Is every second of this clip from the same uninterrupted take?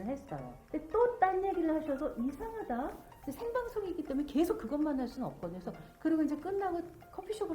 no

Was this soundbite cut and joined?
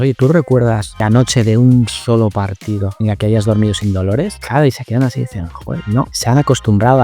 yes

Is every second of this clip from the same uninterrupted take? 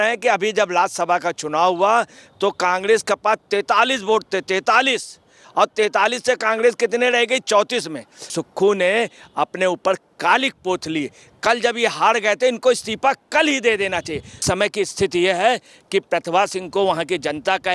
no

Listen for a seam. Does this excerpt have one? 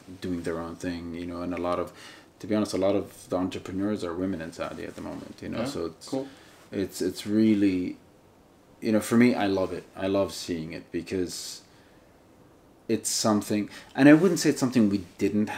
no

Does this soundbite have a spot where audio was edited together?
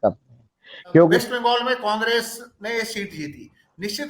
yes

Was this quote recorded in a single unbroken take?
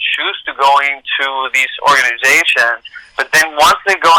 yes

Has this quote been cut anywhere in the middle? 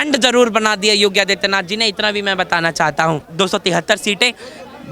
yes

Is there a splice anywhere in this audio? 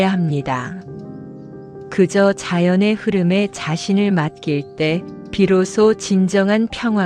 no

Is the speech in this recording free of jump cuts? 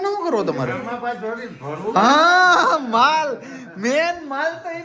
yes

